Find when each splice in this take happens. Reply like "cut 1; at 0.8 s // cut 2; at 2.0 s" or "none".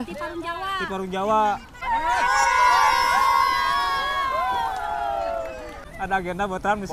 cut 1; at 1.7 s // cut 2; at 5.9 s